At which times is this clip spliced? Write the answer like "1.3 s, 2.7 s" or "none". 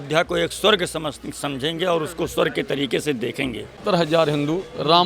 3.8 s